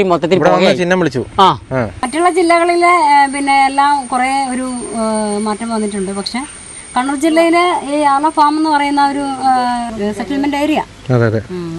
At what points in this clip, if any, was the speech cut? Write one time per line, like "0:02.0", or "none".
0:02.0
0:09.9